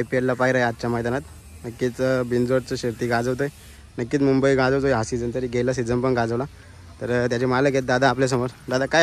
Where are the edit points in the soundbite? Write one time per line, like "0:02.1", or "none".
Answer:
none